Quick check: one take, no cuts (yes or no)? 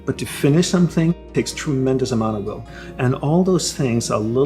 no